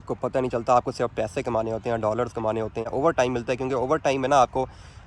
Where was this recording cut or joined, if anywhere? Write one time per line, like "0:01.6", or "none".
0:02.9